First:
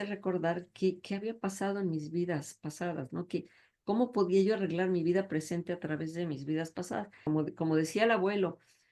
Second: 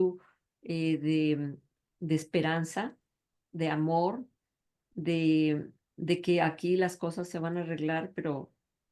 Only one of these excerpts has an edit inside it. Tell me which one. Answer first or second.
first